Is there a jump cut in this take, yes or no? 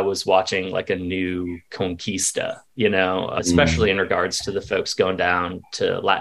yes